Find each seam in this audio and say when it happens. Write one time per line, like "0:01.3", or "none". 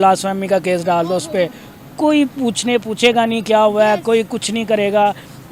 none